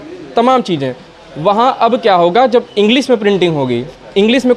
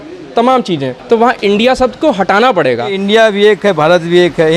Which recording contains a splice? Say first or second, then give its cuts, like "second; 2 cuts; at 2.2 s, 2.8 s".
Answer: second; 2 cuts; at 0.9 s, 3.0 s